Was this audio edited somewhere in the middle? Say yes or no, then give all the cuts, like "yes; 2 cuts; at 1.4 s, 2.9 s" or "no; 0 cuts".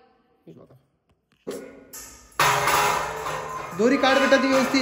yes; 1 cut; at 1.5 s